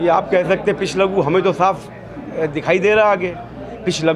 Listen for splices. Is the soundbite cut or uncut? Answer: uncut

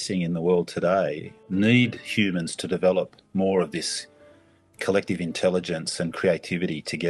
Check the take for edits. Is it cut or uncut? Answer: cut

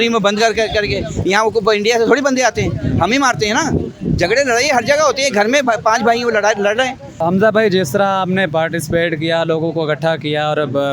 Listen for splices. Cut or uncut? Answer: cut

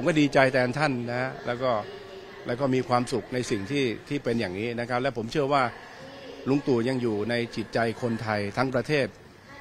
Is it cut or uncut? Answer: uncut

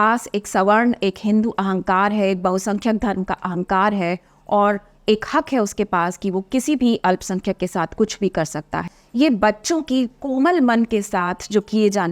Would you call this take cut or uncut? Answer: cut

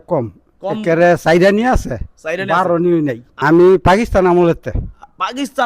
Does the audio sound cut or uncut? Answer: cut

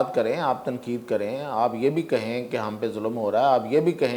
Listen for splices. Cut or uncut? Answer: uncut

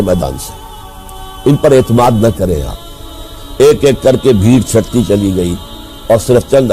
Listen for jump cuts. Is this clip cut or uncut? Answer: cut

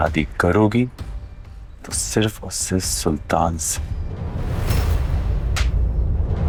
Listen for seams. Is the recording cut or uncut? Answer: uncut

